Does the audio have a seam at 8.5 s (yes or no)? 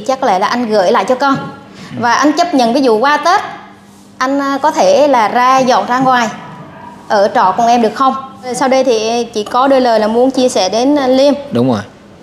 yes